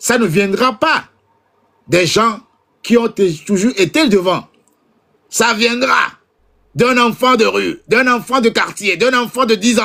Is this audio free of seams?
yes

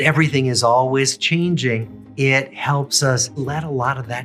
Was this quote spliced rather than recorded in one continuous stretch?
yes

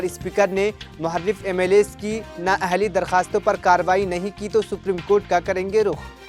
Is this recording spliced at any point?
no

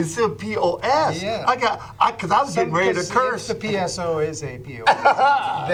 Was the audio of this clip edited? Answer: no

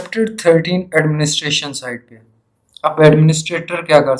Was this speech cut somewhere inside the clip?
no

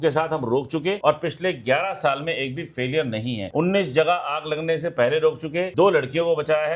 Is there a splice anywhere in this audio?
yes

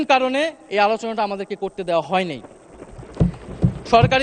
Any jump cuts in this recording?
no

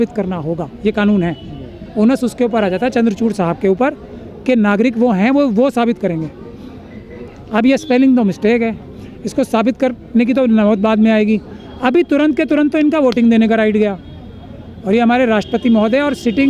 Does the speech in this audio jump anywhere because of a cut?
no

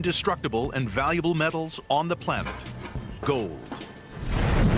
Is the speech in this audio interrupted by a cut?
no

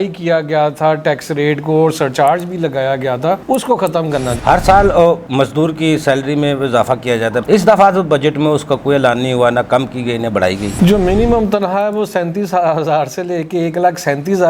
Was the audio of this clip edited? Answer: yes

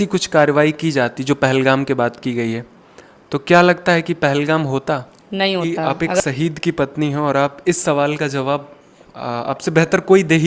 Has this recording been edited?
yes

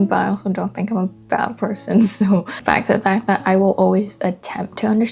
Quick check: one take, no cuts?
no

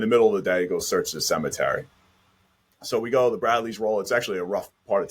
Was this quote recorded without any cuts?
yes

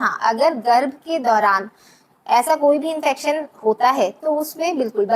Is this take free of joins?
yes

